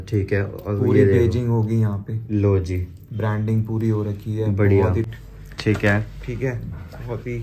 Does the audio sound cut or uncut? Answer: cut